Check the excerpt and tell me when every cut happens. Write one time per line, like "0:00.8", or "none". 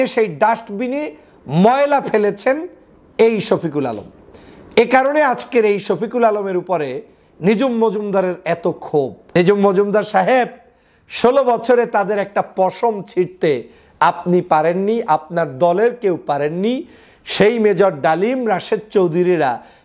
0:09.2